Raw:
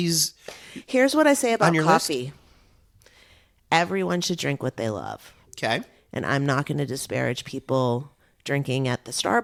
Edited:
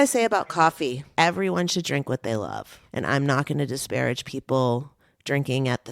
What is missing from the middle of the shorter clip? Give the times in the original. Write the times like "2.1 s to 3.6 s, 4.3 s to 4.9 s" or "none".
2.3 s to 3.6 s, 5.3 s to 6.0 s